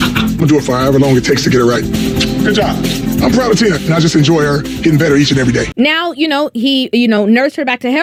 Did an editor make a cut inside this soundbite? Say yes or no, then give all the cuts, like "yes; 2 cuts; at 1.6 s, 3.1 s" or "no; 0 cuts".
no; 0 cuts